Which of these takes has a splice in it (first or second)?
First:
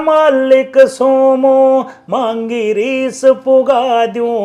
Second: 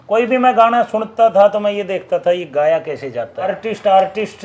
second